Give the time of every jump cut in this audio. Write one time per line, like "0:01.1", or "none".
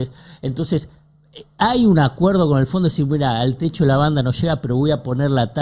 none

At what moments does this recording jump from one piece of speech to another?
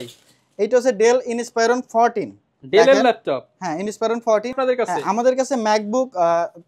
0:04.6

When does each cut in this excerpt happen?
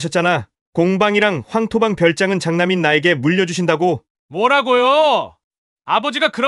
0:04.1

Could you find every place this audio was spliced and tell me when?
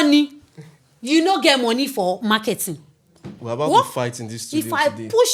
none

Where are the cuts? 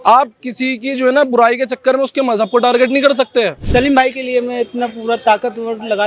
0:03.6

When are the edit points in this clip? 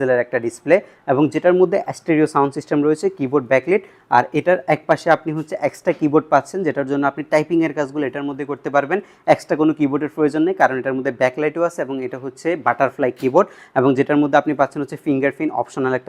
none

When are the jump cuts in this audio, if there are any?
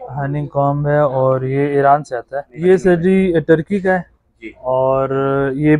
0:02.5

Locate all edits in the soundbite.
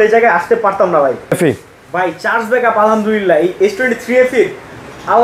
0:01.3

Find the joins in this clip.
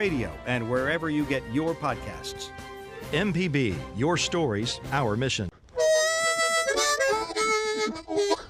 0:05.6

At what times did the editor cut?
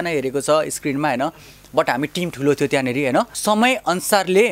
0:03.3

